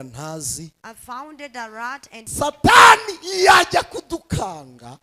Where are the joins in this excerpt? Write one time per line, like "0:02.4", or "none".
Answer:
0:02.2